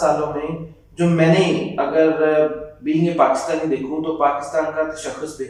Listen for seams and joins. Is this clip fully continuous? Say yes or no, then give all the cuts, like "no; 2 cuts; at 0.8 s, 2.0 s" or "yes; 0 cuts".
yes; 0 cuts